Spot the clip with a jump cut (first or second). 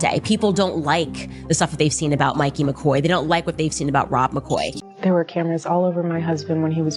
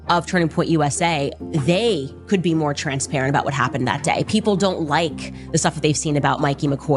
first